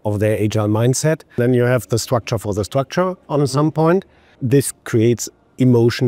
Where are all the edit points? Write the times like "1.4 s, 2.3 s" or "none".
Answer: 1.4 s, 4.3 s